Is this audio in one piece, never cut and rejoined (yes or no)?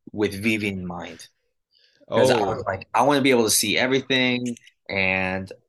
yes